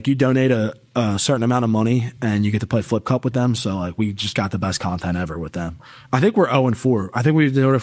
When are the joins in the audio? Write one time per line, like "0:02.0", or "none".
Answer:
none